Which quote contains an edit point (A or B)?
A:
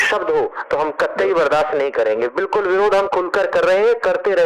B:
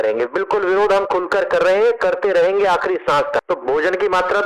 B